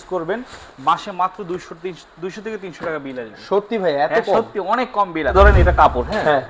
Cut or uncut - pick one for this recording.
cut